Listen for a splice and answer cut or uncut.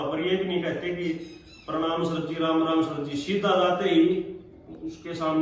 uncut